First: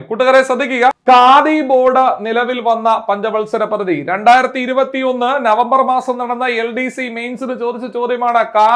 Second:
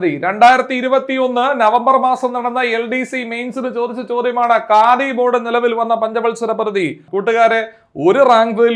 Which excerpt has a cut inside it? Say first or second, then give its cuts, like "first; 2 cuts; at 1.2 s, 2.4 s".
second; 1 cut; at 7.1 s